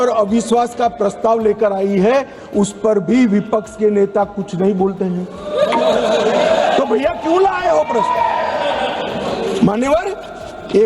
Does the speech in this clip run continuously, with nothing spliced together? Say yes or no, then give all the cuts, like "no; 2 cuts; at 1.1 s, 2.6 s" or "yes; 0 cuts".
yes; 0 cuts